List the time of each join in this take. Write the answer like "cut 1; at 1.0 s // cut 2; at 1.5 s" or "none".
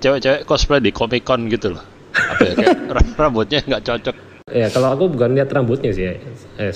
cut 1; at 4.4 s